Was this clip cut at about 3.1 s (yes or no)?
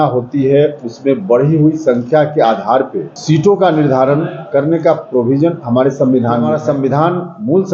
yes